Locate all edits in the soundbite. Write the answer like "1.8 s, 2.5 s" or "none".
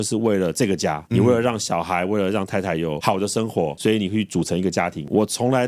none